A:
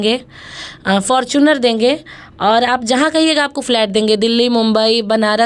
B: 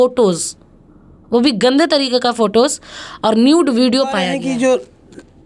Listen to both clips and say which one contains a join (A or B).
B